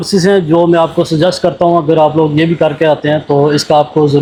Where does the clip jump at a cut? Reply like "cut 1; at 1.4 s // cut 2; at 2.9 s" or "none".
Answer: none